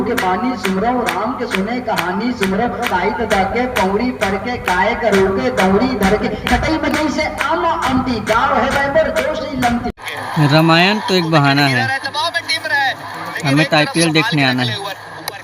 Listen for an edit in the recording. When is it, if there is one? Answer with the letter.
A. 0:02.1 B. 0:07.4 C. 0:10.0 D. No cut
C